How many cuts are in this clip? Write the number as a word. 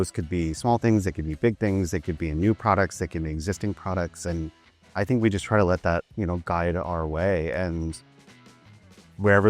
zero